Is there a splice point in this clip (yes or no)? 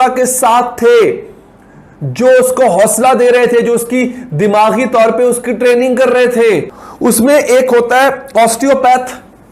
yes